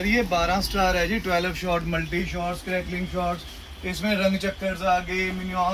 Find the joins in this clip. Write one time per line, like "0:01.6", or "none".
none